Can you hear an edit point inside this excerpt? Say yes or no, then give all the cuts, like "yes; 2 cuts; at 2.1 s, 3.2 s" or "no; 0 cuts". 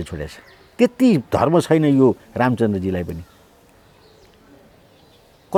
no; 0 cuts